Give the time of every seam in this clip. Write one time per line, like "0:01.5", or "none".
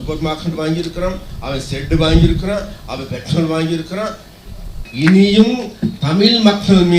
0:04.8